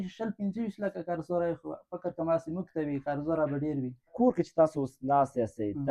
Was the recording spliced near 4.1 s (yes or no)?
yes